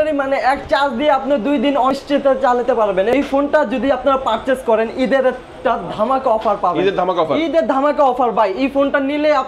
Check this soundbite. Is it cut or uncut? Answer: cut